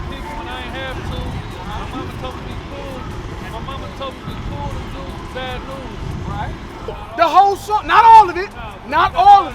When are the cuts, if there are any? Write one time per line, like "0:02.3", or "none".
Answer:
0:07.0